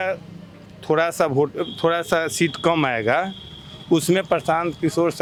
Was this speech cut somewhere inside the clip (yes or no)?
no